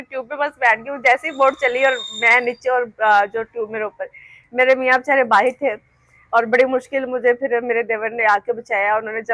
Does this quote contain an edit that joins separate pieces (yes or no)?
no